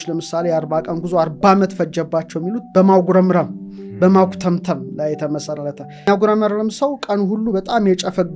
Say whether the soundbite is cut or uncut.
uncut